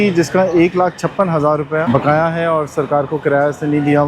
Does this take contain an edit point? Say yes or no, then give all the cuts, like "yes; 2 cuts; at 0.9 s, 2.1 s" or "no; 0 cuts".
yes; 1 cut; at 1.8 s